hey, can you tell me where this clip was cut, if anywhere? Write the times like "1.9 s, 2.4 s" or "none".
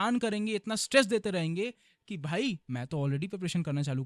2.6 s